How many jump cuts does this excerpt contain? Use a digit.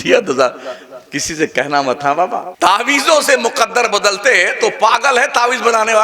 1